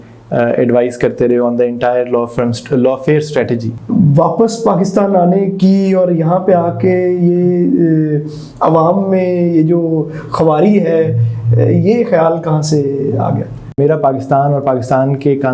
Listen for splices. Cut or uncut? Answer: cut